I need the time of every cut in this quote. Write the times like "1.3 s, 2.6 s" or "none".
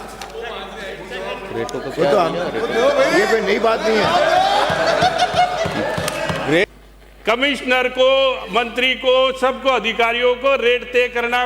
6.6 s